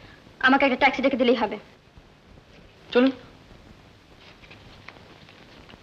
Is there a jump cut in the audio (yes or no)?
no